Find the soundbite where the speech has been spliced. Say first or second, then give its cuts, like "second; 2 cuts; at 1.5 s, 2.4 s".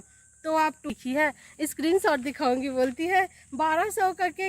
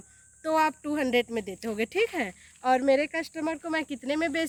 first; 1 cut; at 0.9 s